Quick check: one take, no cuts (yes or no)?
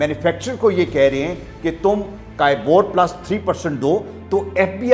yes